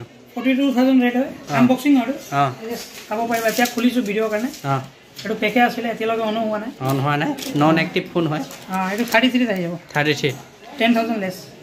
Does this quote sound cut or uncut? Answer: uncut